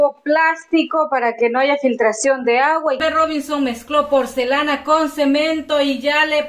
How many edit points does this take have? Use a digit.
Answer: 1